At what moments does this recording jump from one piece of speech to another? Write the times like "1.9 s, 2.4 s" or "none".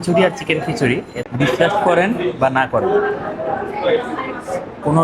1.2 s